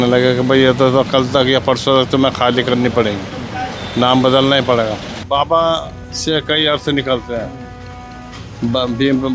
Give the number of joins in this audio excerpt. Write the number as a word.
one